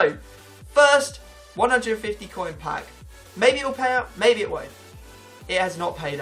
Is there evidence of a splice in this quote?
yes; 1 cut; at 1.5 s

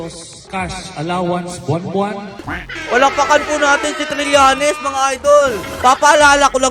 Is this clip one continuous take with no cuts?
no; 2 cuts; at 2.3 s, 5.6 s

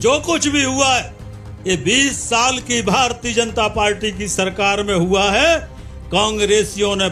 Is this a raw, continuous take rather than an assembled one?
yes; 0 cuts

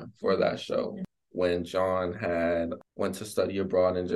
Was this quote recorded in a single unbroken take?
no; 2 cuts; at 1.0 s, 2.8 s

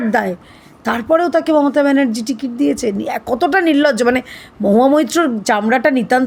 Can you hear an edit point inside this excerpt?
no; 0 cuts

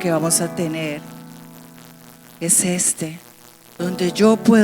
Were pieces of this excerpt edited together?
yes; 1 cut; at 3.7 s

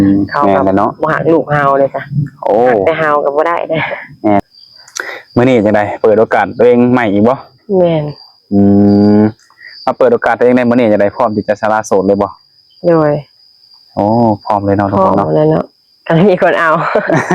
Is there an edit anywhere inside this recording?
yes; 1 cut; at 4.4 s

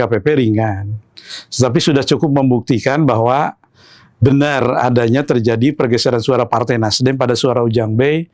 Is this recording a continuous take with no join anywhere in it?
yes; 0 cuts

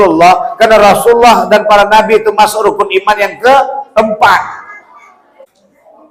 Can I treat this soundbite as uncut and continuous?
yes; 0 cuts

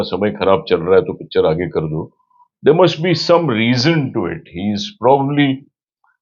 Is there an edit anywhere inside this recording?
no; 0 cuts

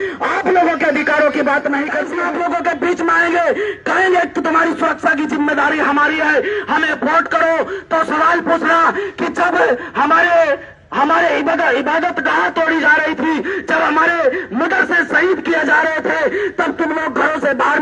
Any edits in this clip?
yes; 1 cut; at 2.0 s

